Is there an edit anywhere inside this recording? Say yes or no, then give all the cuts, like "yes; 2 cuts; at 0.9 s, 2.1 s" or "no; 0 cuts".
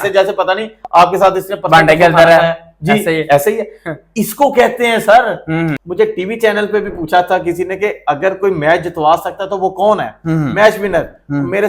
yes; 1 cut; at 5.8 s